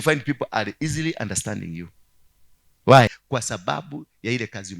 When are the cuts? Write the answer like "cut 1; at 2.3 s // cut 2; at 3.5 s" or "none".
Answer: cut 1; at 3.2 s